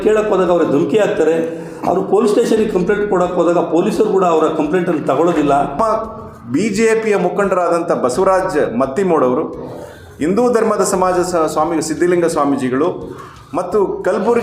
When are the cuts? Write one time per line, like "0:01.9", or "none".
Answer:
0:05.8